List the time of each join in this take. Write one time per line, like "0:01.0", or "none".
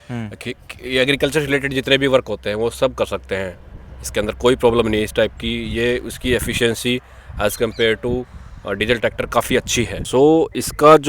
0:10.0